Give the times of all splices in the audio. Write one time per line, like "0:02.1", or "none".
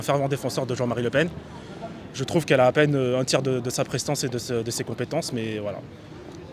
none